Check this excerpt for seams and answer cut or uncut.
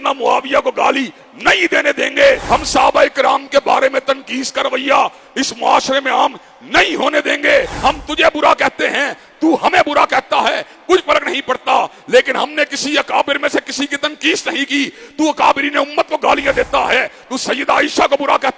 cut